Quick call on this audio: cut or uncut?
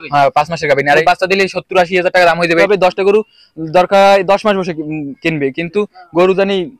cut